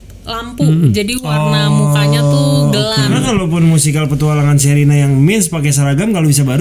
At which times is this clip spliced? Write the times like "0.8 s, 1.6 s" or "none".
3.2 s